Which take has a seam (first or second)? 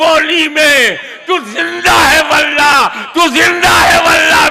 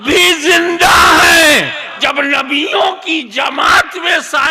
second